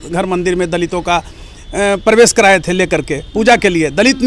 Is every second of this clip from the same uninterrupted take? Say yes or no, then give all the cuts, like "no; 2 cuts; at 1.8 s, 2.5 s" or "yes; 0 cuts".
yes; 0 cuts